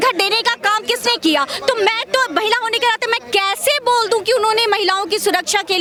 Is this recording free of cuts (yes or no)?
yes